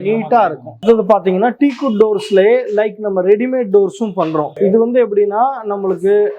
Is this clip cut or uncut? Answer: uncut